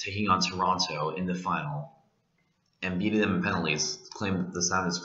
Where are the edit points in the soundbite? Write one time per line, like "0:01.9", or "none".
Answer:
0:01.2